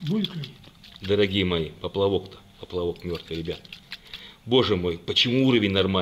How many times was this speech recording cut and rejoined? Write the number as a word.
zero